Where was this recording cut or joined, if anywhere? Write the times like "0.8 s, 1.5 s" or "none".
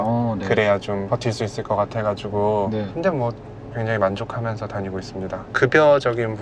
1.0 s, 3.7 s, 5.4 s